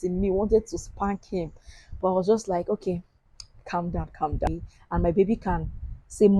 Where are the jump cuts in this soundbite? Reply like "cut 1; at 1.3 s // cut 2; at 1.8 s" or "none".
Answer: cut 1; at 4.5 s

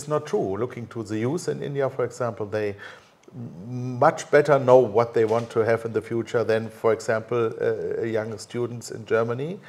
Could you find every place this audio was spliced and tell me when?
none

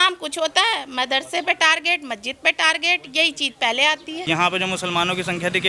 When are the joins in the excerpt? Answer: cut 1; at 4.2 s

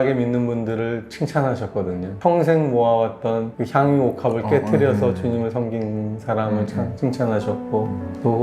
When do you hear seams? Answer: cut 1; at 2.2 s

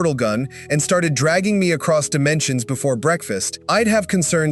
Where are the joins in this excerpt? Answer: cut 1; at 3.5 s

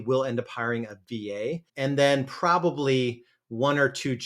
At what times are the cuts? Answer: cut 1; at 1.7 s

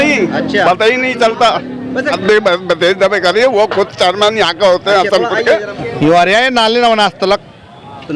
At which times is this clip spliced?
cut 1; at 2.2 s // cut 2; at 5.8 s

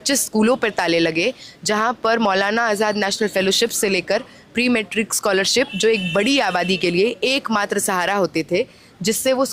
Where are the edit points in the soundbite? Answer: none

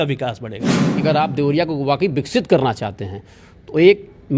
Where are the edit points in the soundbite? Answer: cut 1; at 1.0 s

